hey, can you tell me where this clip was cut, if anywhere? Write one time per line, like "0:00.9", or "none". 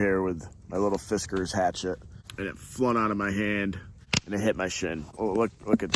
0:02.2
0:04.1
0:05.1